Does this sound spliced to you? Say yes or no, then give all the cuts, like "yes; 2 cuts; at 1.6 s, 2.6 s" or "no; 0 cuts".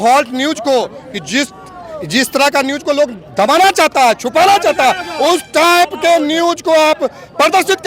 no; 0 cuts